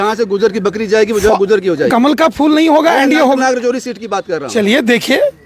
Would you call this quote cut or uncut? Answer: cut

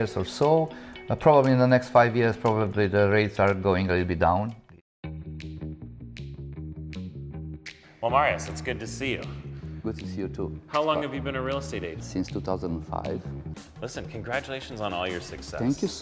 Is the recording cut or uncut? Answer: cut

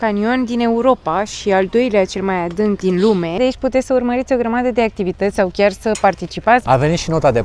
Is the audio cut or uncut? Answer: cut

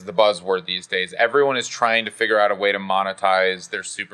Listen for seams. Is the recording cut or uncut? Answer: uncut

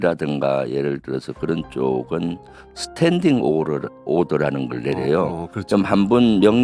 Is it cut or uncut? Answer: uncut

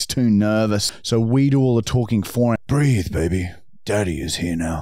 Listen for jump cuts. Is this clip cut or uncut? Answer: cut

